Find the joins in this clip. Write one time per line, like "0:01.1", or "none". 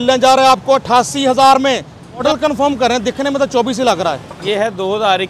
0:02.2
0:04.4